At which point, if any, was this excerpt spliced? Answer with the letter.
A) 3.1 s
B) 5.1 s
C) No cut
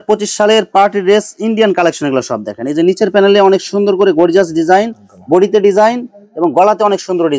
C